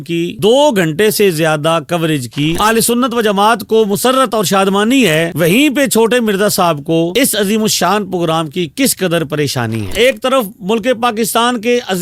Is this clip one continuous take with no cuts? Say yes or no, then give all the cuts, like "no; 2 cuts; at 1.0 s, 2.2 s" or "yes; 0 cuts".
no; 2 cuts; at 2.6 s, 9.9 s